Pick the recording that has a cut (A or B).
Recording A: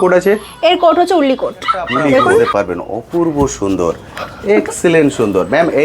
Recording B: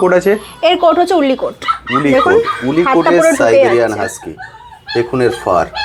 A